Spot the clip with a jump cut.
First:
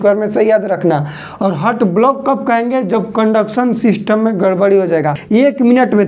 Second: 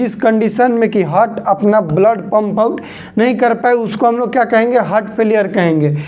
first; 1 cut; at 5.2 s

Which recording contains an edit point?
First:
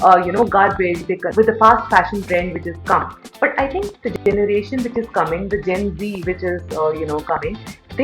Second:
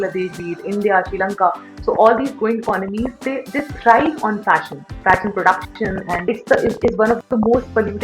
first; 1 cut; at 1.3 s

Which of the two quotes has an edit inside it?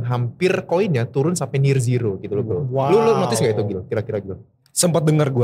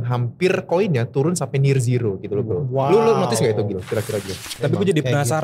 second; 1 cut; at 4.5 s

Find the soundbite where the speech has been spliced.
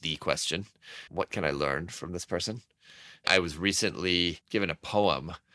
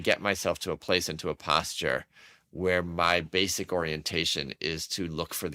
first; 1 cut; at 1.1 s

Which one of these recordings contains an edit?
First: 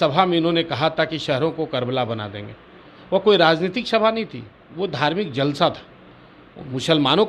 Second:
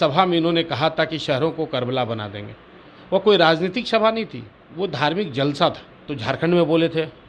second; 1 cut; at 6.1 s

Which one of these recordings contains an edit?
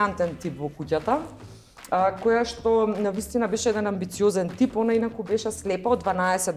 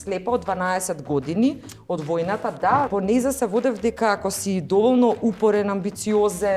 second; 1 cut; at 2.9 s

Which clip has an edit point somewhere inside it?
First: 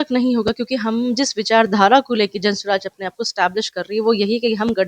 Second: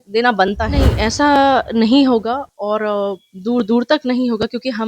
second; 1 cut; at 0.9 s

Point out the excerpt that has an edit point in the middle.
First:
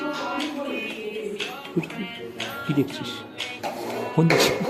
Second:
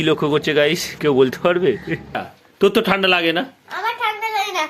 second; 1 cut; at 2.2 s

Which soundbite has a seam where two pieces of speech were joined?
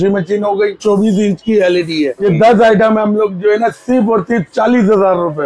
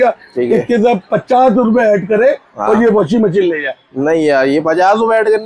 first; 2 cuts; at 0.8 s, 2.2 s

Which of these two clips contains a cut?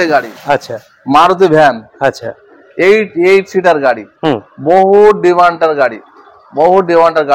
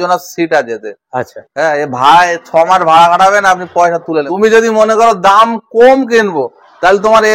second; 1 cut; at 4.3 s

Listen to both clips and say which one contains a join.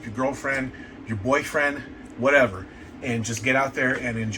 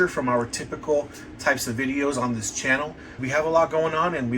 second; 1 cut; at 3.2 s

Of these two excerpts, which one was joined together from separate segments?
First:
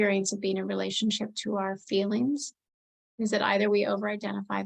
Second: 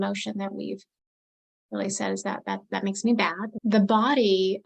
second; 1 cut; at 3.5 s

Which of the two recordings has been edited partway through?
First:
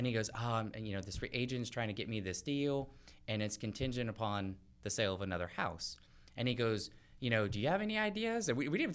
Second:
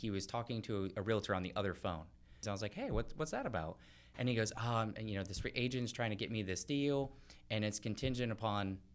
second; 1 cut; at 2.4 s

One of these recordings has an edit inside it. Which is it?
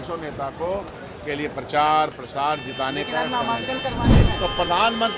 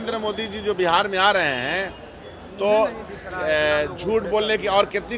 first; 1 cut; at 4.1 s

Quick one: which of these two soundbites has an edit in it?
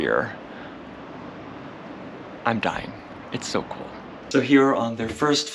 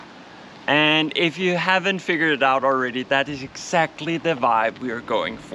first; 1 cut; at 4.3 s

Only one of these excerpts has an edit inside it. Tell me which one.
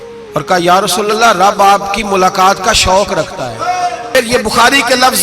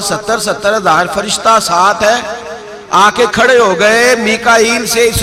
first; 1 cut; at 4.1 s

